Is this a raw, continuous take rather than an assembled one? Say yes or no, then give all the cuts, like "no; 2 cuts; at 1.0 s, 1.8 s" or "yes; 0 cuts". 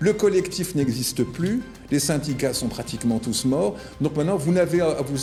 yes; 0 cuts